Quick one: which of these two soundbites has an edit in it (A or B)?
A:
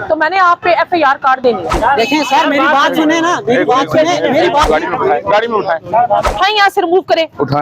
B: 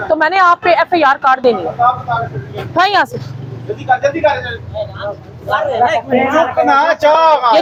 A